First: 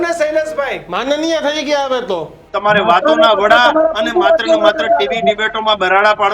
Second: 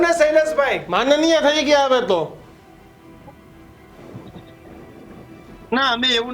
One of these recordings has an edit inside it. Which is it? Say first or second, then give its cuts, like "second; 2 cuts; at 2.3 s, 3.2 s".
first; 1 cut; at 2.5 s